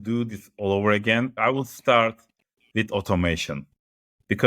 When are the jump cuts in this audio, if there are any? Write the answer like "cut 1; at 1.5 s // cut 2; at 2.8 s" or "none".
cut 1; at 1.3 s